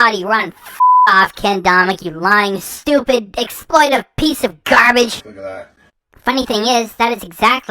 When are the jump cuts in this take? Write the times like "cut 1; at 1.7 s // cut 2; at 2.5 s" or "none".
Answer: cut 1; at 5.3 s